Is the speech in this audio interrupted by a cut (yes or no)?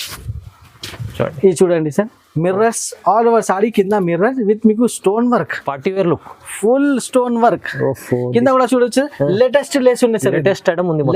no